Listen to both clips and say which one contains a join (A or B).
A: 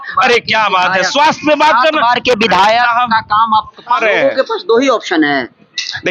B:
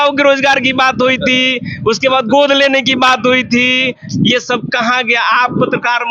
A